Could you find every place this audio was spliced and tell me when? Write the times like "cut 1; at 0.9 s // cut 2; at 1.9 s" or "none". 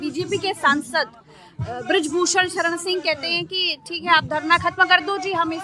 none